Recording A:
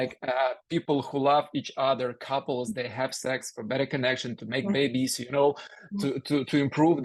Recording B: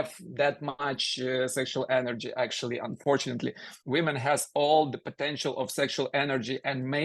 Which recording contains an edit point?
B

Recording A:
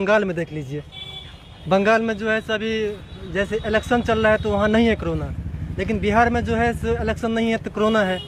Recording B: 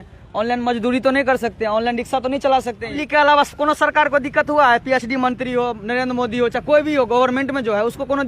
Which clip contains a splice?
B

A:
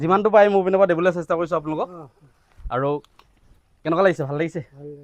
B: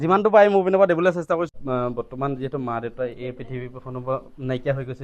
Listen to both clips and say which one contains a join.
B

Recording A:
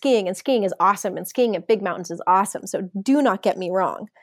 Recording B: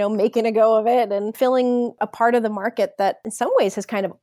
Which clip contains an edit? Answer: B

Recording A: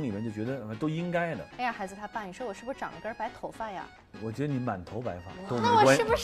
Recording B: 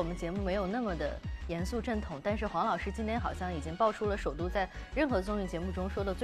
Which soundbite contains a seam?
A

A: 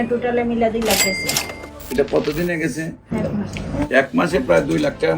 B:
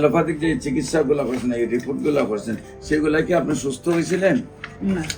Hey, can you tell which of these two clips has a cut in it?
A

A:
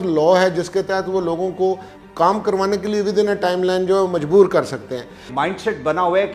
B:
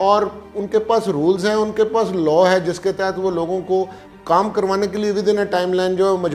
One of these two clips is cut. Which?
A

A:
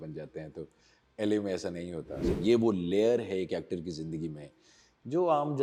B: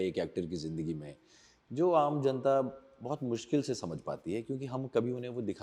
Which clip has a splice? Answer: A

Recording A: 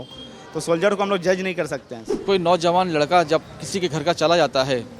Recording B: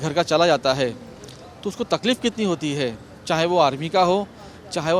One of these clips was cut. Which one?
A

